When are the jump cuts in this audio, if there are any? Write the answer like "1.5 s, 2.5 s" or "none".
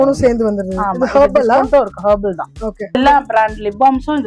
2.9 s